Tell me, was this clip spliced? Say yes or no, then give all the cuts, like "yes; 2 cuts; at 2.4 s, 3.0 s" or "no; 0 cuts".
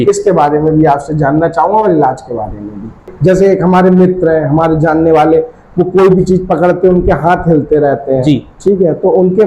yes; 1 cut; at 3.1 s